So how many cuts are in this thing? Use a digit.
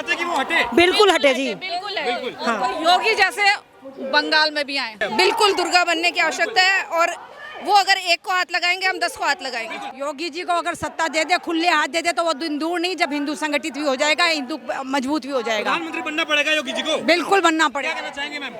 2